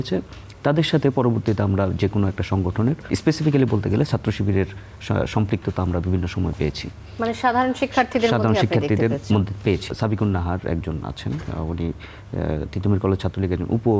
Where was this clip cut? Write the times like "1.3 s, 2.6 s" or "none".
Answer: 3.1 s, 9.9 s